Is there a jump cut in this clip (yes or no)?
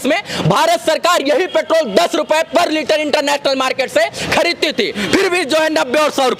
no